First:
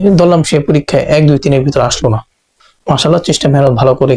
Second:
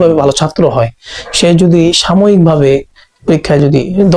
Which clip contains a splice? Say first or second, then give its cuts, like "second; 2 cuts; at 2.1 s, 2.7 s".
first; 1 cut; at 2.6 s